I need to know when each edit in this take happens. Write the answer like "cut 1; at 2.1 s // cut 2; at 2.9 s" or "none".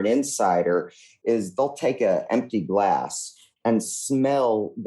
cut 1; at 1.2 s